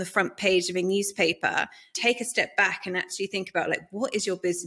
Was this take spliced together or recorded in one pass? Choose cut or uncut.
cut